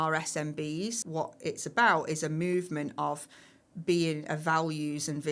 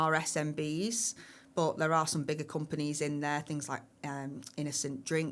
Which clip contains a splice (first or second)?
first